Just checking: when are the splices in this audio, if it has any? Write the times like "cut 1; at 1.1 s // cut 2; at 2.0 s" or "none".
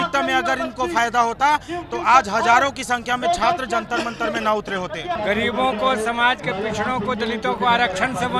cut 1; at 5.2 s